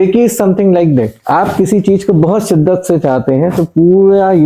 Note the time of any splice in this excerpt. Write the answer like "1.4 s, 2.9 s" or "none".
1.2 s